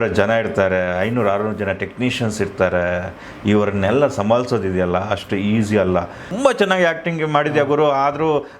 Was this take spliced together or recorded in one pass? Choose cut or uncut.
cut